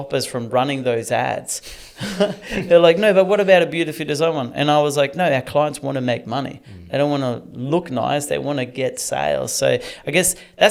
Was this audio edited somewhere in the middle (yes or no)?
no